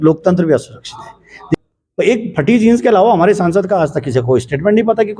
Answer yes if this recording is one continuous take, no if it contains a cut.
no